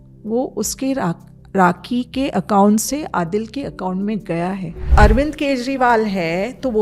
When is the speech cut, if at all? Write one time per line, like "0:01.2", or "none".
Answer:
0:04.9